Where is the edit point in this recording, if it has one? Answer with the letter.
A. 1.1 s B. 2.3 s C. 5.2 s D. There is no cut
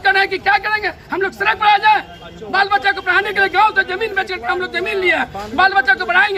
D